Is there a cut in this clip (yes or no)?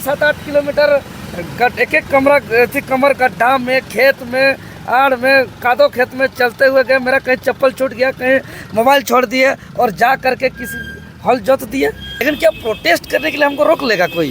yes